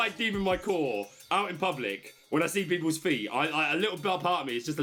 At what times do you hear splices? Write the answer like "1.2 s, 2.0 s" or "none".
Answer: none